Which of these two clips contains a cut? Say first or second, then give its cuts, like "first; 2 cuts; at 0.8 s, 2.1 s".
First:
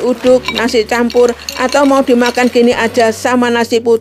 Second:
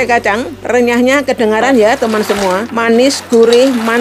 second; 1 cut; at 2.7 s